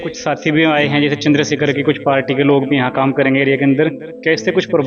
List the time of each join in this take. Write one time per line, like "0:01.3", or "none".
none

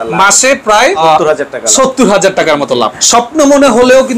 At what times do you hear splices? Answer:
0:01.0
0:03.0

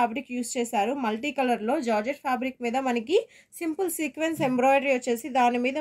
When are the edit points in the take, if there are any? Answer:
none

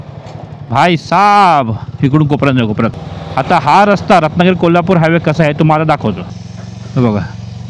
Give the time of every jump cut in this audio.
0:02.9
0:06.4

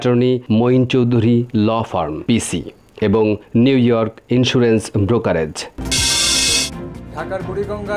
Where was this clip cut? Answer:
0:05.7

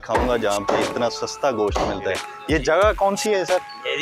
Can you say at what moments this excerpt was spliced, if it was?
0:02.3

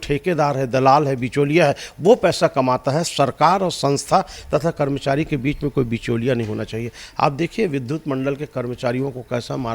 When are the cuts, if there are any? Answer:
none

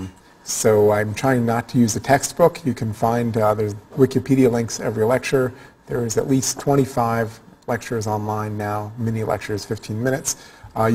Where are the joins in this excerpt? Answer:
0:05.0

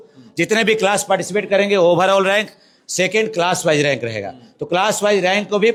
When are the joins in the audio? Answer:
none

